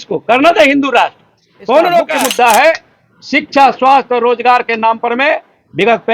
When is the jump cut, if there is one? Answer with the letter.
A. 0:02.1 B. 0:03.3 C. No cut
A